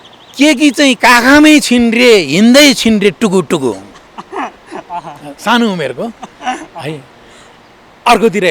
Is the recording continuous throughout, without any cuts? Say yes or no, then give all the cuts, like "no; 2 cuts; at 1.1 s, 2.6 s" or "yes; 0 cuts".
yes; 0 cuts